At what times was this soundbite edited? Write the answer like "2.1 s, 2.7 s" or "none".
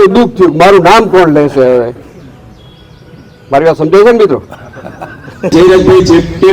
5.5 s